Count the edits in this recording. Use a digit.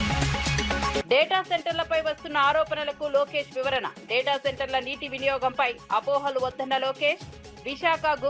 1